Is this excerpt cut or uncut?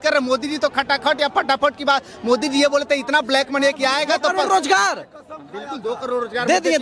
uncut